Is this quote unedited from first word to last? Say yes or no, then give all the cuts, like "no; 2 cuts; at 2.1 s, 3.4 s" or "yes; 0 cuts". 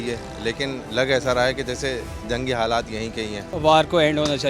no; 1 cut; at 3.5 s